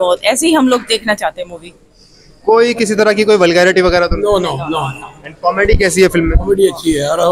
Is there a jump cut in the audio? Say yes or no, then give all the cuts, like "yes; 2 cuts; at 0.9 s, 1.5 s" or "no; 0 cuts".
no; 0 cuts